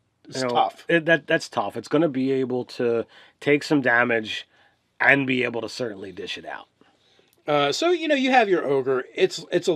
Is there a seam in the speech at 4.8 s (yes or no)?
yes